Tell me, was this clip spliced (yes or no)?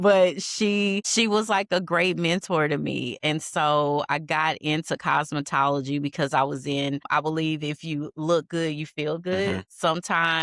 yes